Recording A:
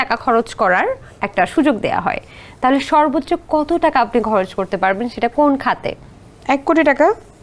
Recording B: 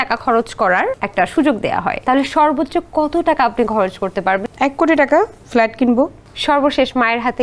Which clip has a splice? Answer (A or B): B